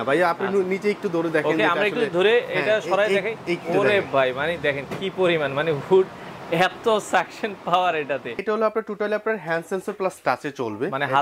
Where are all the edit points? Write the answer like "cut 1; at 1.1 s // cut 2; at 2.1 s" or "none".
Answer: cut 1; at 8.4 s

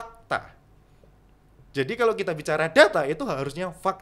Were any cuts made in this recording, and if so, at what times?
none

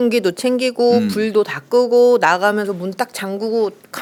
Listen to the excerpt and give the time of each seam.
none

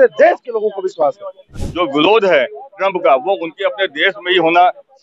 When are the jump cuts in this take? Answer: cut 1; at 1.6 s

